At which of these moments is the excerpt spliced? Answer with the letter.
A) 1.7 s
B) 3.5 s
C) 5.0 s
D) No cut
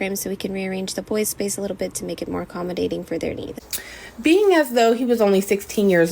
B